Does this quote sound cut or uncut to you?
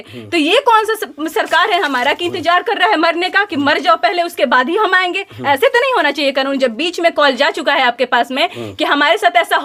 uncut